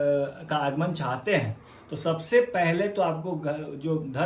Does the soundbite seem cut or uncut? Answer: uncut